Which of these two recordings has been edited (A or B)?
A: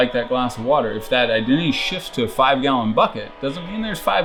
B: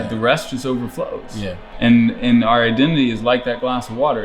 B